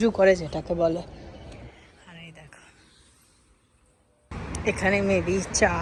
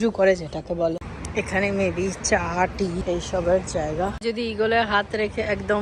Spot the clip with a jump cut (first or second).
second